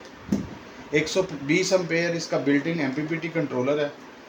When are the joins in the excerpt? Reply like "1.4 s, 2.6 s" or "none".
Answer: none